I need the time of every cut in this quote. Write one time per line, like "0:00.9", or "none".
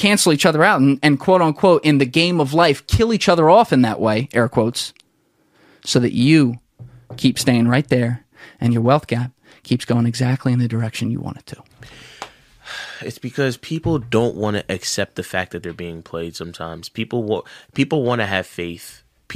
0:11.8

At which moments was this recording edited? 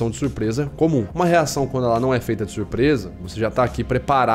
0:01.1

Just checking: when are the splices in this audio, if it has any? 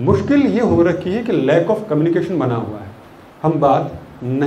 none

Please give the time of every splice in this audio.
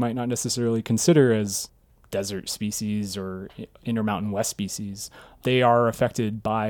none

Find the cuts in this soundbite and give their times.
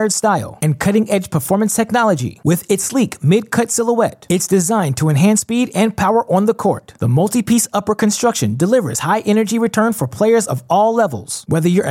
none

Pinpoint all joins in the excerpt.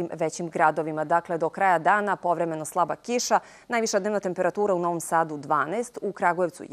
none

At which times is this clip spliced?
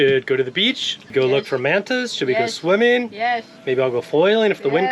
0:01.1

